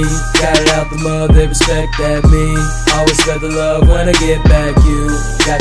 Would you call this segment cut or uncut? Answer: uncut